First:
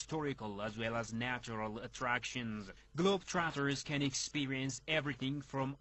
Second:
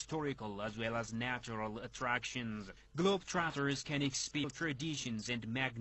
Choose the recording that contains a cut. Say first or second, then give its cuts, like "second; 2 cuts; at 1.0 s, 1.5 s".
first; 1 cut; at 4.4 s